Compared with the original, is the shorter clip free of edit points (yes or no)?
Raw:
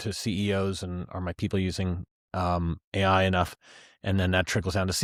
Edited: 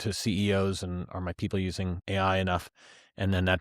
no